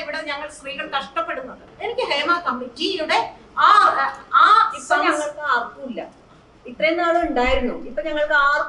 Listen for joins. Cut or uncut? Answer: cut